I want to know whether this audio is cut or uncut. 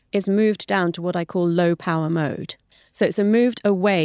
uncut